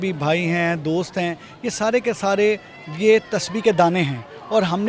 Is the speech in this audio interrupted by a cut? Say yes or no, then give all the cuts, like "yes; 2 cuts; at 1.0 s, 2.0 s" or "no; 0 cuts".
no; 0 cuts